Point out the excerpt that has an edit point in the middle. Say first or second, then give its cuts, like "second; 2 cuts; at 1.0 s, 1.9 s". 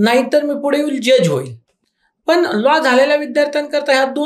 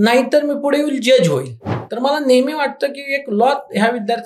second; 1 cut; at 1.8 s